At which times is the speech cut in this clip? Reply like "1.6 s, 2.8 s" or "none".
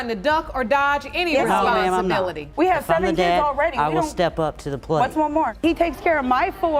none